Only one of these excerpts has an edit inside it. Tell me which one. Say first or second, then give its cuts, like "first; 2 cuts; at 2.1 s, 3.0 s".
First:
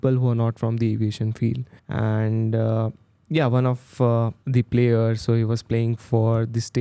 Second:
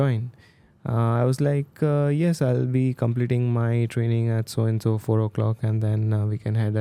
first; 2 cuts; at 1.7 s, 4.4 s